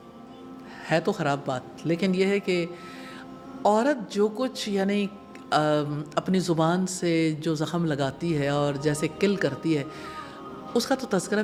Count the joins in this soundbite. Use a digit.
0